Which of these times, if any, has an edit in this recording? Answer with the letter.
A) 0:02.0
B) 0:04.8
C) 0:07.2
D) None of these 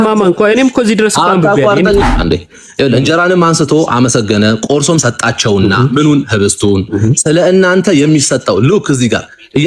A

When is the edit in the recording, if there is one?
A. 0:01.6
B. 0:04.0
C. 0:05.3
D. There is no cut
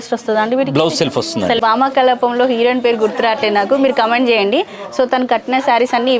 A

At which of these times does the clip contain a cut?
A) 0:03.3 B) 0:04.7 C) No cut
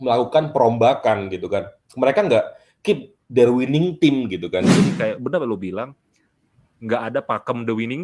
B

